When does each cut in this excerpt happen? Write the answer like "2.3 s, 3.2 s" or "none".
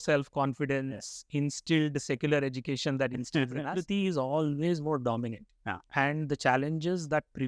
3.7 s